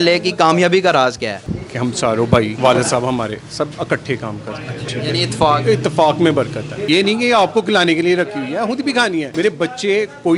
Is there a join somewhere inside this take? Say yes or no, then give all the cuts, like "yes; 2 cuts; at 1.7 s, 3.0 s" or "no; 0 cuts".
yes; 5 cuts; at 1.4 s, 2.6 s, 4.9 s, 6.7 s, 9.3 s